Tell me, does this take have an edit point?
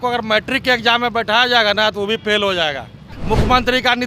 yes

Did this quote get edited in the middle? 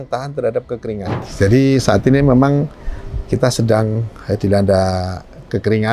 yes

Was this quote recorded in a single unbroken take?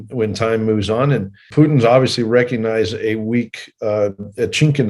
no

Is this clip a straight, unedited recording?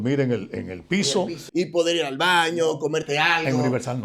no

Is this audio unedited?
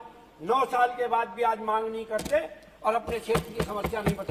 yes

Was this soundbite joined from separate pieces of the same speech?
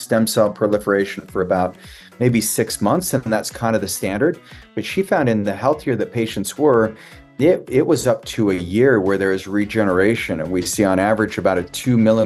no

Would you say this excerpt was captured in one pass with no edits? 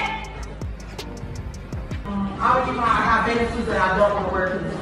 no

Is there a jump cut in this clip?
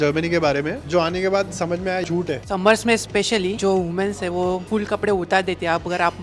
yes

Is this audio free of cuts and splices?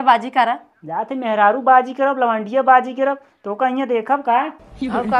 yes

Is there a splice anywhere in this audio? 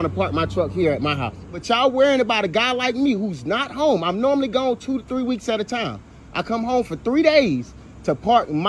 yes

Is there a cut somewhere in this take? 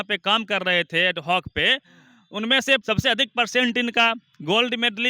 yes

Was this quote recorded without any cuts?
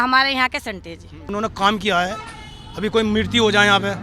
no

